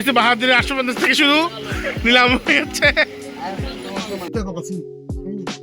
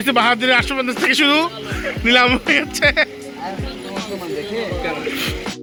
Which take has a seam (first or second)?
first